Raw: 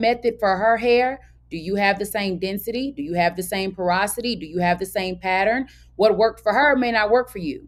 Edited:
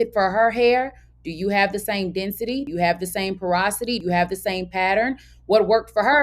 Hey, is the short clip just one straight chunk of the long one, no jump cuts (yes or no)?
no